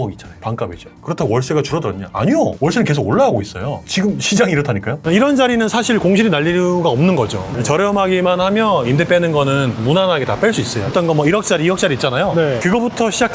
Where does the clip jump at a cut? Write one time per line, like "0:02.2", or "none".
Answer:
0:03.8
0:05.0
0:10.9